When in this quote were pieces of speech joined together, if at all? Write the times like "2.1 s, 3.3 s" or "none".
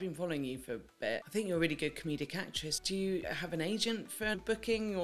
1.2 s, 3.2 s, 4.3 s